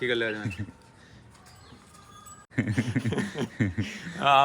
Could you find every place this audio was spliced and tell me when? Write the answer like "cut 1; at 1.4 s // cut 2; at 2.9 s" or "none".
cut 1; at 2.5 s